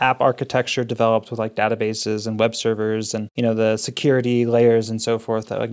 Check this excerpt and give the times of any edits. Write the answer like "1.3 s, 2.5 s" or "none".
3.3 s